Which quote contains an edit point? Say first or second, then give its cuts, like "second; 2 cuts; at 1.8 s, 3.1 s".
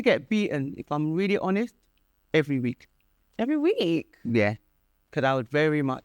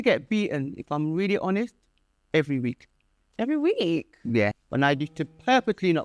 second; 1 cut; at 4.6 s